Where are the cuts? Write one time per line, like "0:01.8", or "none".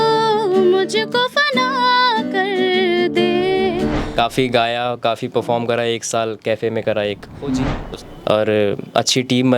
0:04.0
0:07.8